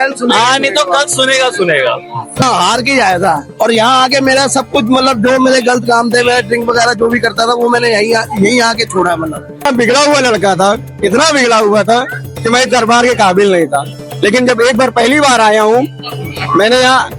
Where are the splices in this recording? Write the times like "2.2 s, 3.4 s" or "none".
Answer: 2.4 s, 9.7 s